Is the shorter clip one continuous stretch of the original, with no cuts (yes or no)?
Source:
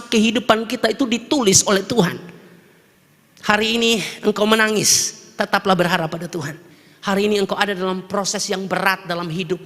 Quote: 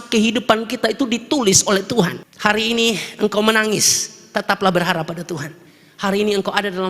no